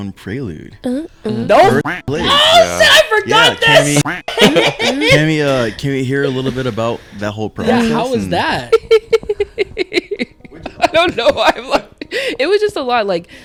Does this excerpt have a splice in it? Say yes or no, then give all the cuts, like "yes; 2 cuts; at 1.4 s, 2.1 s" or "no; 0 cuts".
no; 0 cuts